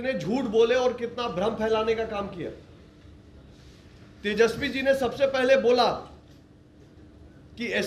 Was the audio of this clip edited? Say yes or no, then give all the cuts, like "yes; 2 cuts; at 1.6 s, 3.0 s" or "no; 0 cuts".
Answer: no; 0 cuts